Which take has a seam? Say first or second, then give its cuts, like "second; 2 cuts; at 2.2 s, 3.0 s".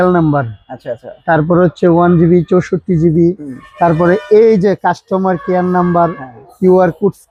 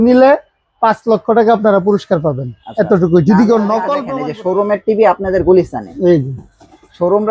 second; 1 cut; at 4.1 s